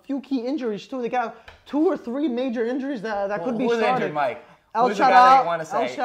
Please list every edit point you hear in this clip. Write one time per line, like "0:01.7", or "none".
none